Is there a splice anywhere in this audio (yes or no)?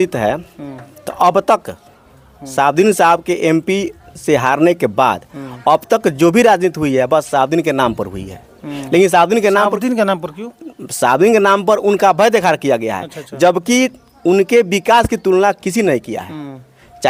no